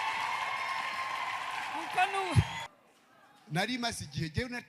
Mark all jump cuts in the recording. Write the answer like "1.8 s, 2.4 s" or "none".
2.6 s